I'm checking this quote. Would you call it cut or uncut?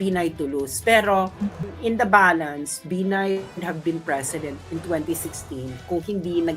cut